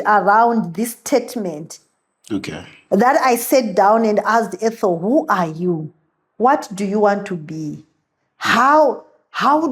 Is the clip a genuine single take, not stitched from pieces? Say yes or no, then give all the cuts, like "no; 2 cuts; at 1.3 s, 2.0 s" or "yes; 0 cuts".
yes; 0 cuts